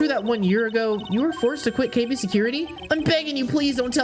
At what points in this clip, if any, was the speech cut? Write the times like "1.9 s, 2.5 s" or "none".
2.7 s

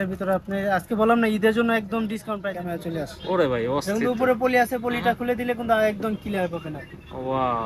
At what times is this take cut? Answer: 2.4 s

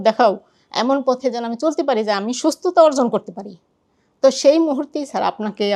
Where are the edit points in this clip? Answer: none

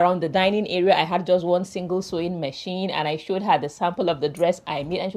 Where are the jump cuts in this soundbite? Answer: none

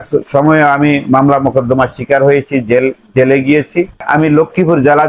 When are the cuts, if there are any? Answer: 4.0 s

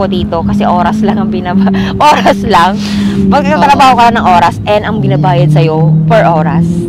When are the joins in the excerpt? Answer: none

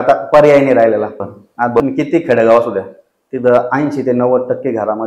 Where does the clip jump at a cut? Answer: 1.8 s

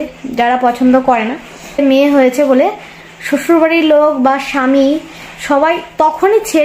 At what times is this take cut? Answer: 1.8 s

